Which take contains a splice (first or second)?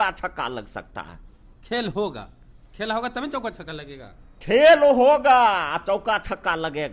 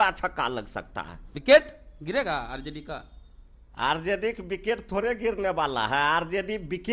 second